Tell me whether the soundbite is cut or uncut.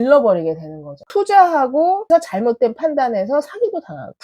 cut